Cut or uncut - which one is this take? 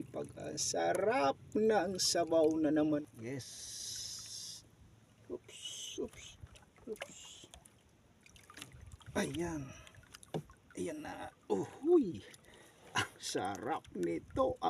cut